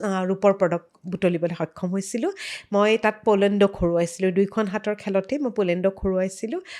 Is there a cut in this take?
no; 0 cuts

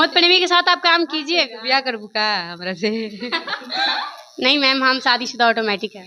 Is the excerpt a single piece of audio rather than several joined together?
yes; 0 cuts

